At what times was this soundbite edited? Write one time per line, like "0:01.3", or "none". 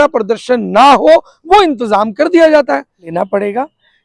0:03.1